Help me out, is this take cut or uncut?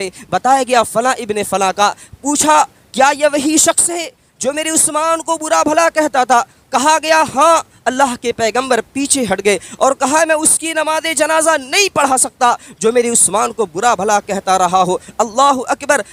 uncut